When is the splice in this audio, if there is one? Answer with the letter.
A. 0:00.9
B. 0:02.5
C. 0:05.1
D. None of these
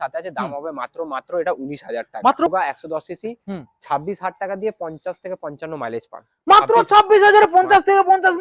B